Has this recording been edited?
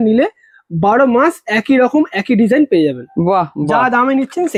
no; 0 cuts

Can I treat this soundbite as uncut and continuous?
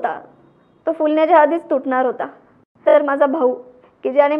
no; 1 cut; at 2.9 s

